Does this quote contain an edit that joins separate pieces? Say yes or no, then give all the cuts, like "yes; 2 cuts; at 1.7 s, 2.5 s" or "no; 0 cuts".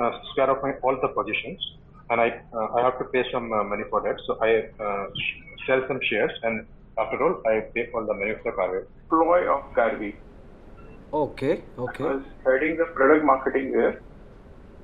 yes; 1 cut; at 9.0 s